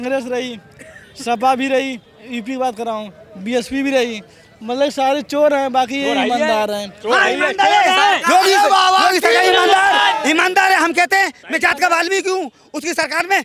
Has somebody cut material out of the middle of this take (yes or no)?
no